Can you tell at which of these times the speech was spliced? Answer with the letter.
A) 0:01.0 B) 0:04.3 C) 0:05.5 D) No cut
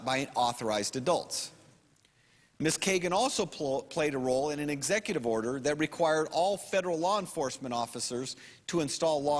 D